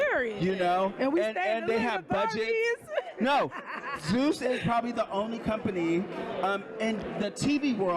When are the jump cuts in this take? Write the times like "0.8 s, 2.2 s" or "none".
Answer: none